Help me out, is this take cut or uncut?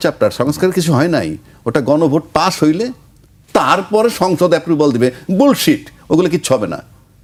uncut